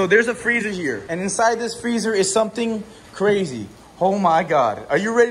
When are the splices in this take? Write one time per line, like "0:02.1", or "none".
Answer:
0:01.1